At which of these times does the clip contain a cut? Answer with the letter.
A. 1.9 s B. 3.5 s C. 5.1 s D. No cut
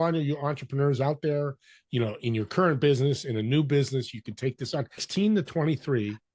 C